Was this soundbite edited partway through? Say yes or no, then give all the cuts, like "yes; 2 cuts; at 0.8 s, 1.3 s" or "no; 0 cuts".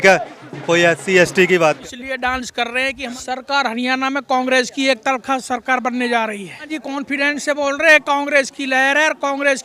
yes; 3 cuts; at 1.8 s, 3.1 s, 6.7 s